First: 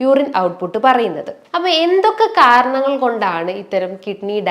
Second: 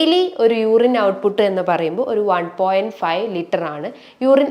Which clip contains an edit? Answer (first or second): first